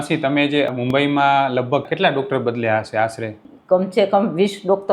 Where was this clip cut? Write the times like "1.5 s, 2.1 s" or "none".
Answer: 0.7 s, 1.9 s, 3.4 s